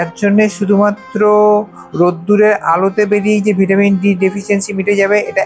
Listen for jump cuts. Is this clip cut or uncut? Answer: uncut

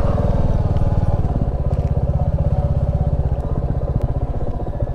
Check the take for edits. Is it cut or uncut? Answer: uncut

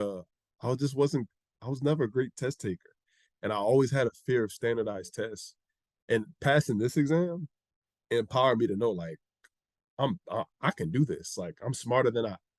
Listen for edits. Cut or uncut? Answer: uncut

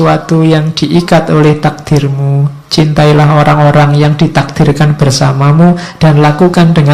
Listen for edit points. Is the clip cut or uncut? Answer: uncut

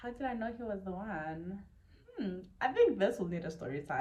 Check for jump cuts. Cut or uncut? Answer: uncut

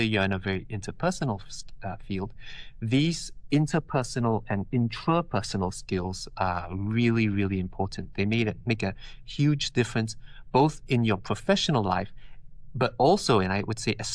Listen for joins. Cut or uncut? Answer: uncut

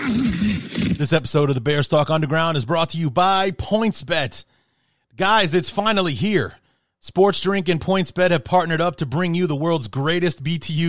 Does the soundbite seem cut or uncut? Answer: cut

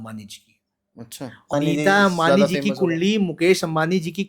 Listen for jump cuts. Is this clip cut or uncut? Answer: cut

